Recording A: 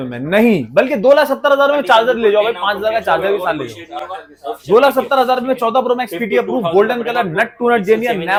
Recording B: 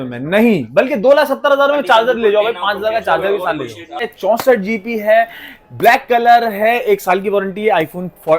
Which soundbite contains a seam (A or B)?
B